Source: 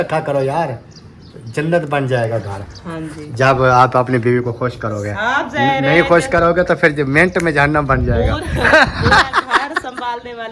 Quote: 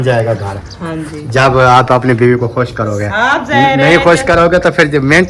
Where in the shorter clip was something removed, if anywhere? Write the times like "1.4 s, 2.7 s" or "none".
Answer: none